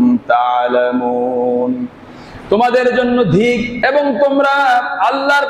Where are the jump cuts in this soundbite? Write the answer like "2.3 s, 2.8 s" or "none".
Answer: 3.7 s